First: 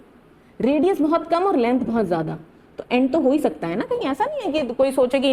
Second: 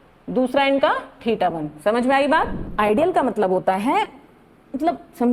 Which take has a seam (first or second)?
second